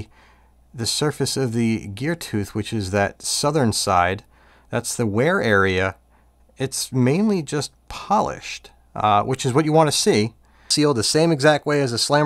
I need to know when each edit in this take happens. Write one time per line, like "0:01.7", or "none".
0:10.7